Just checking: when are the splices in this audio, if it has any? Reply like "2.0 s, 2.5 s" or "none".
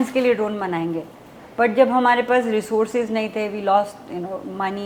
none